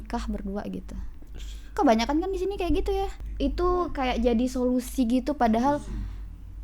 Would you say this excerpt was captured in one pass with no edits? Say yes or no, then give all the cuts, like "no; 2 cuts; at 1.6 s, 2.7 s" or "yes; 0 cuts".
no; 1 cut; at 3.2 s